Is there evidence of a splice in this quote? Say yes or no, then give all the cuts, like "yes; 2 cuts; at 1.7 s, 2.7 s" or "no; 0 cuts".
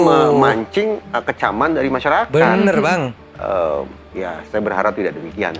no; 0 cuts